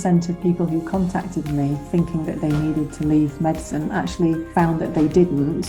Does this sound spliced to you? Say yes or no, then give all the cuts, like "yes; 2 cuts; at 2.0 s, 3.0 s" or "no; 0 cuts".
no; 0 cuts